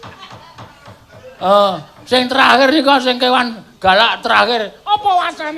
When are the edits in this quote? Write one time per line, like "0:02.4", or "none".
0:01.9